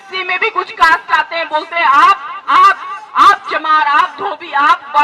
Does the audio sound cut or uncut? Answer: uncut